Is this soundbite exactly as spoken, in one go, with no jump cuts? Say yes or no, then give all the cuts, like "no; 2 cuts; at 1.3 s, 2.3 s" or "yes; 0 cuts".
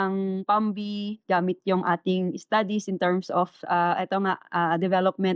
yes; 0 cuts